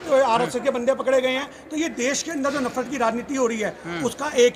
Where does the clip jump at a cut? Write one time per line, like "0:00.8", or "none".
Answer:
none